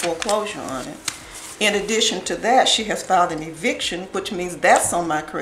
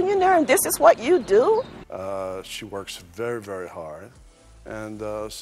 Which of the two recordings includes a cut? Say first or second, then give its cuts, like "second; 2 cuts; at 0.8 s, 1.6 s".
second; 1 cut; at 1.9 s